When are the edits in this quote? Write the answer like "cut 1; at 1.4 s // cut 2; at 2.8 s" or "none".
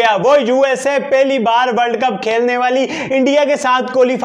none